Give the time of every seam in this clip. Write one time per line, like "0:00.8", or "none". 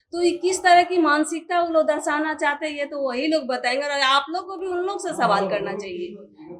none